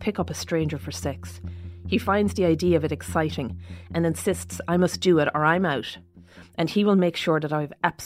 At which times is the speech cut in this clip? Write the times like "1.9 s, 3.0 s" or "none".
none